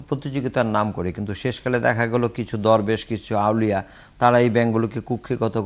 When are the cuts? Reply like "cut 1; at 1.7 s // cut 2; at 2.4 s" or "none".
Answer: none